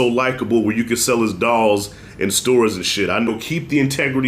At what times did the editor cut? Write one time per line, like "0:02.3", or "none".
0:03.3